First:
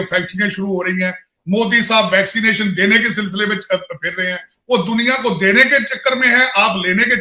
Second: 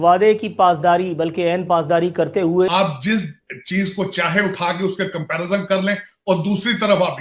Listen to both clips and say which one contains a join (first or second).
second